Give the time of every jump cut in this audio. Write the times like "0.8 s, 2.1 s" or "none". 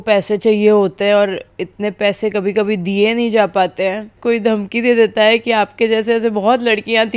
4.1 s